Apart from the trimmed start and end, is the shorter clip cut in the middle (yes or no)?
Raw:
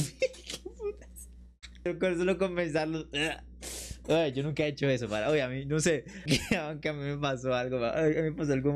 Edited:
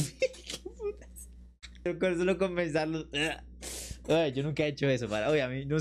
no